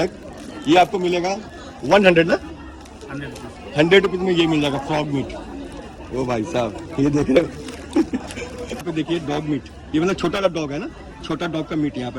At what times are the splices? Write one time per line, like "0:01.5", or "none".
none